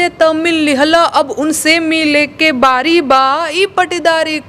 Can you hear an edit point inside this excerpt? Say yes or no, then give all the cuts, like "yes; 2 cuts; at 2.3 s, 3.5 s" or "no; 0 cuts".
no; 0 cuts